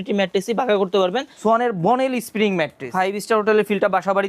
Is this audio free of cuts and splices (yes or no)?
no